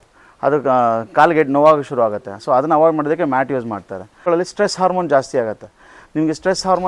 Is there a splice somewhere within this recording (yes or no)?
yes